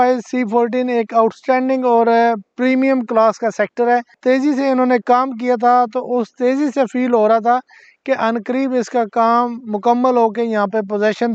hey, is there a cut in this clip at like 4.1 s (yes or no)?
yes